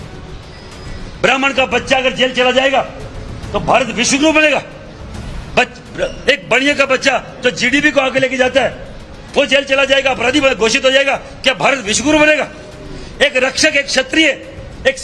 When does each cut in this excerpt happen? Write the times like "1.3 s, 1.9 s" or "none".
none